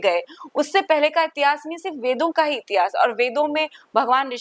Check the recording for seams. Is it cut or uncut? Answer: uncut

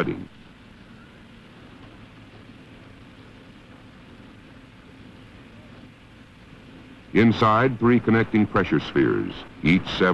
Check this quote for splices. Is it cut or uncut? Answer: uncut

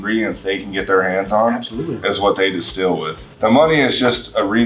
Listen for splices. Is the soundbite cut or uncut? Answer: cut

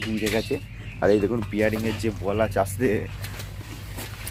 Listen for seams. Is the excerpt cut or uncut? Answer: uncut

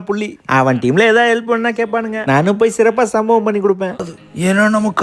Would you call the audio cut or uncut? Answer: cut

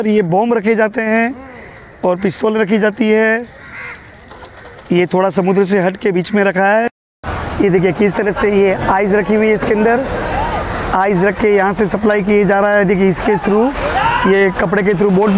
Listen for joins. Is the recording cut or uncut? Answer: cut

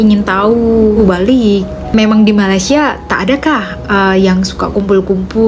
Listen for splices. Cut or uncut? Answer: cut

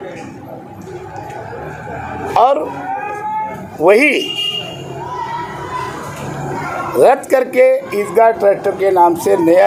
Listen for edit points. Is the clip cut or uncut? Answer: uncut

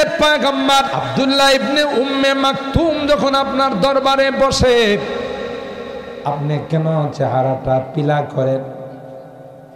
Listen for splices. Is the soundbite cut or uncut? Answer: cut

